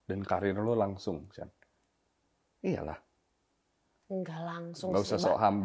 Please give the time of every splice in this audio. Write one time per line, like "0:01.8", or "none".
none